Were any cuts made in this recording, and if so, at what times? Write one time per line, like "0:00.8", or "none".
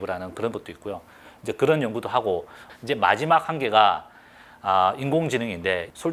none